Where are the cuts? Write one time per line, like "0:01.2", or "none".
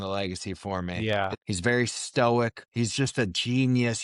0:01.0
0:02.6

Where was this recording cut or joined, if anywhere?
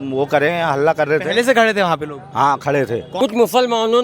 0:03.1

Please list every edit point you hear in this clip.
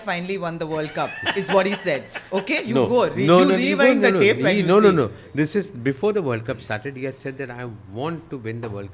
none

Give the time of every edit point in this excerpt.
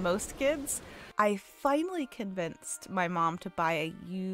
0:01.0

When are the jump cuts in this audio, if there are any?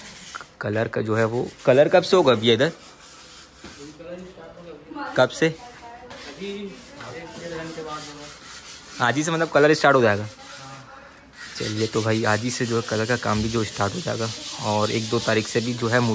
none

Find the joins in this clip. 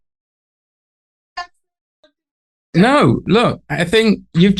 none

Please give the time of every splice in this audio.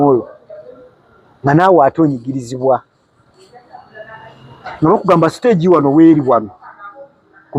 none

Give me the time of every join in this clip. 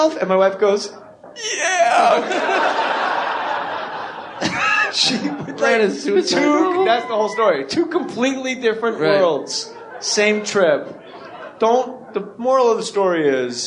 0:08.5

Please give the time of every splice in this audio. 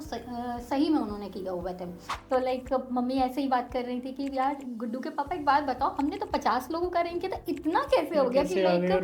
0:02.1

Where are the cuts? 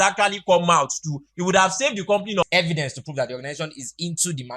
0:02.4

